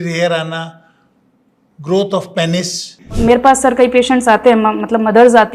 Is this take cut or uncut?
cut